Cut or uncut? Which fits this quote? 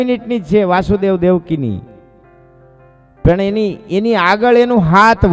uncut